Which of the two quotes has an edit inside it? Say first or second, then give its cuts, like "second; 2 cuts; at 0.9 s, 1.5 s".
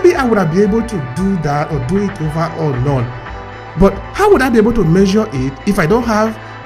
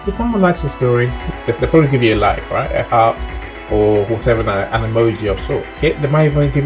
second; 2 cuts; at 1.2 s, 5.8 s